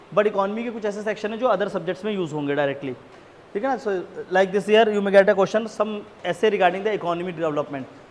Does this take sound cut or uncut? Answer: uncut